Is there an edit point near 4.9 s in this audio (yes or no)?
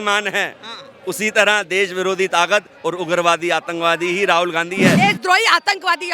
yes